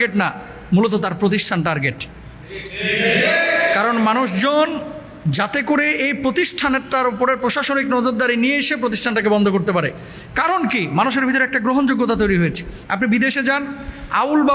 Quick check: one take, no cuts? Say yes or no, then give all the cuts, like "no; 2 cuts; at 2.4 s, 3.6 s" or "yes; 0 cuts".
yes; 0 cuts